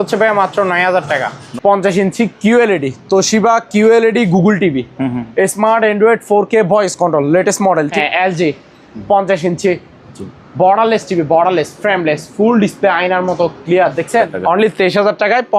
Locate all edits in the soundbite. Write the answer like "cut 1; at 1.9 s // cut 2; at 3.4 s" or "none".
cut 1; at 1.4 s // cut 2; at 7.9 s // cut 3; at 14.3 s